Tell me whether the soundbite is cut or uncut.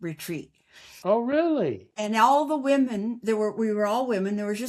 uncut